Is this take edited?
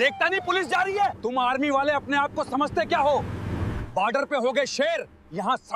yes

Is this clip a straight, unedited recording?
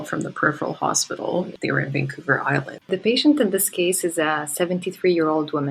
no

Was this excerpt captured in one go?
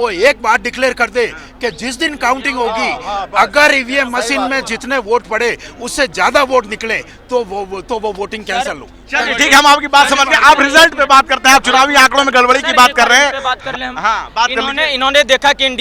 yes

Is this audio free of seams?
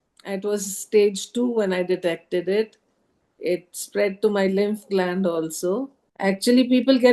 no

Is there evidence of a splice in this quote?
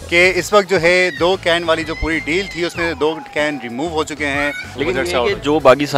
yes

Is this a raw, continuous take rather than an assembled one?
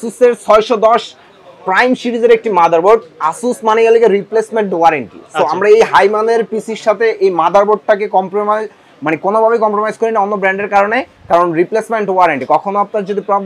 yes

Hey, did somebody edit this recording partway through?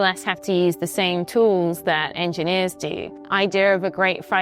yes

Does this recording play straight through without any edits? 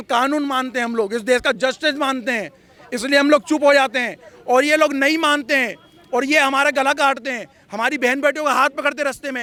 yes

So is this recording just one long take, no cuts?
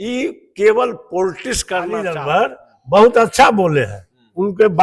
no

